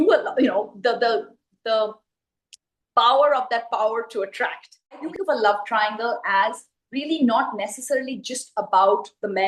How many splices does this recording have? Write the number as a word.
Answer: one